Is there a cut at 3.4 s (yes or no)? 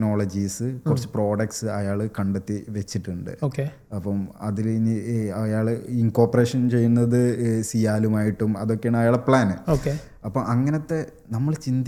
no